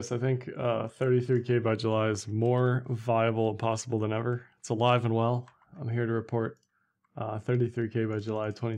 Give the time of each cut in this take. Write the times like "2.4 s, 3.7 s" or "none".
none